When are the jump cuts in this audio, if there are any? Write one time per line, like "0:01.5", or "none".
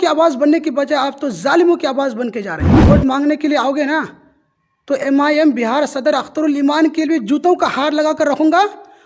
0:02.7